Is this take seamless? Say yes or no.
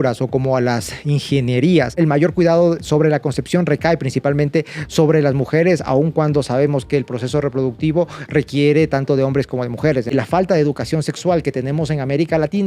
no